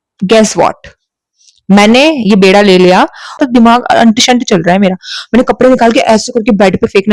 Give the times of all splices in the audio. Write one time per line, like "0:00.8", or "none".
0:03.4